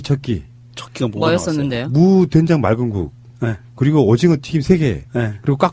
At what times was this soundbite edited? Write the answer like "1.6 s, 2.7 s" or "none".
none